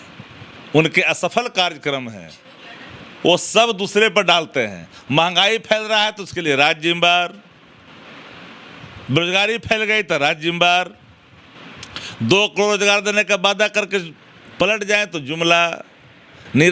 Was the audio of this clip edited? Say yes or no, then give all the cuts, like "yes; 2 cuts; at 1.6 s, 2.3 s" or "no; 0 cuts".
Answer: no; 0 cuts